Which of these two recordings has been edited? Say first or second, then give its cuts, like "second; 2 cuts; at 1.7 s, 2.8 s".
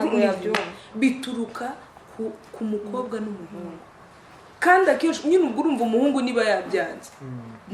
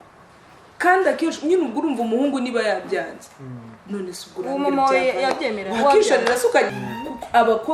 second; 1 cut; at 6.7 s